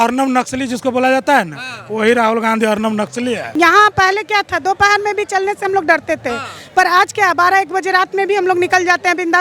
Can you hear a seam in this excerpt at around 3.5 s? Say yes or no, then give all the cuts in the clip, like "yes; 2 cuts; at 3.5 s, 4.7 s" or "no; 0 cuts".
yes; 1 cut; at 3.5 s